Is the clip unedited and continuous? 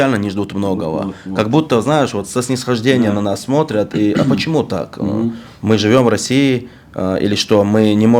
yes; 0 cuts

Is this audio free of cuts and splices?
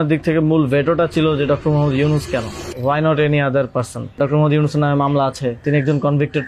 no; 3 cuts; at 2.6 s, 4.2 s, 5.6 s

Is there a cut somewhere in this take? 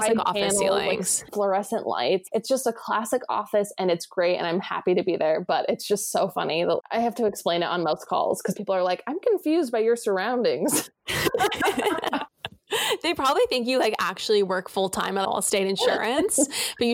yes; 3 cuts; at 1.3 s, 2.2 s, 15.2 s

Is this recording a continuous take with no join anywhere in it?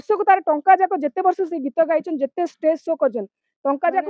yes; 0 cuts

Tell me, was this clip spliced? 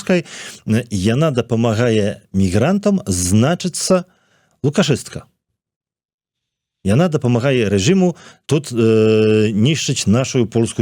no; 0 cuts

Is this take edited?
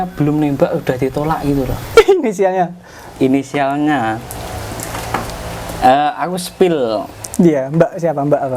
yes; 1 cut; at 1.8 s

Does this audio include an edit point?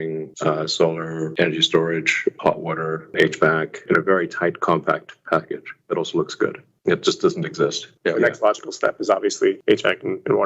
yes; 1 cut; at 7.9 s

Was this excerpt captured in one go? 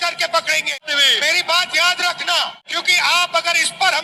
no; 2 cuts; at 0.8 s, 2.7 s

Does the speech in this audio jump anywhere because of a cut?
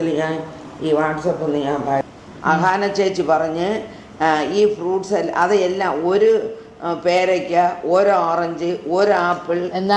yes; 1 cut; at 2.0 s

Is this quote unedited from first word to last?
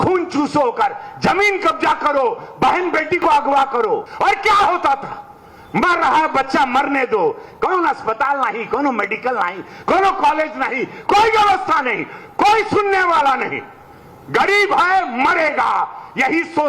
no; 1 cut; at 4.1 s

